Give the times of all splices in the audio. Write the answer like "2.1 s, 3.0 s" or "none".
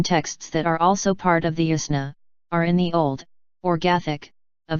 none